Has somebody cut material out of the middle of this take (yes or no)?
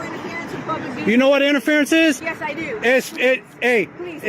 yes